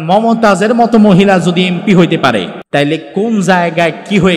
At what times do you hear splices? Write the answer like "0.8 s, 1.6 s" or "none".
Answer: 2.6 s